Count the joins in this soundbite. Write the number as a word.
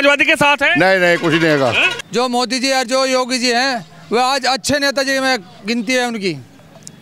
one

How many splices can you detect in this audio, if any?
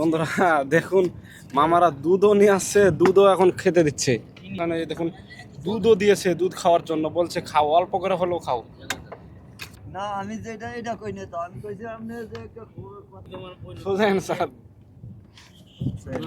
three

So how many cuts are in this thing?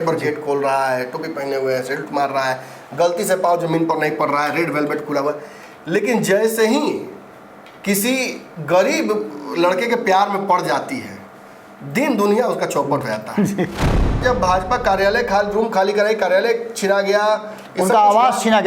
one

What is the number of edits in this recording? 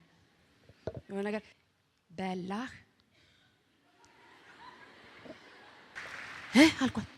two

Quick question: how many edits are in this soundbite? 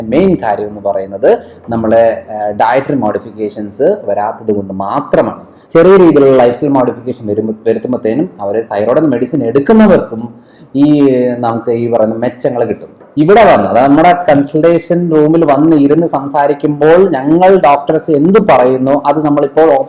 two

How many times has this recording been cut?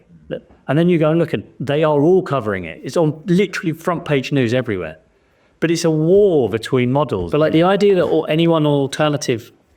one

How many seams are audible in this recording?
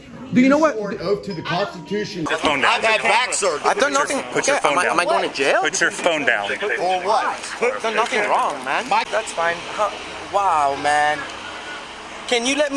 two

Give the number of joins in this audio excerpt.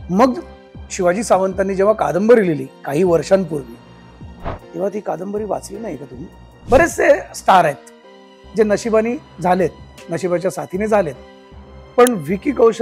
one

